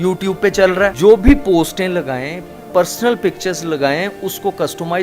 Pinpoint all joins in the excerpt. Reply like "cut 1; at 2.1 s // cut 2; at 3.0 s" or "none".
none